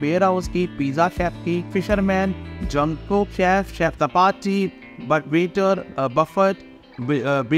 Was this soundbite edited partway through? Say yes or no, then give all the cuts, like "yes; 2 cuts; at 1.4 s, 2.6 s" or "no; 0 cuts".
no; 0 cuts